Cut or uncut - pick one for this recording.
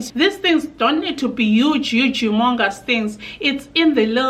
uncut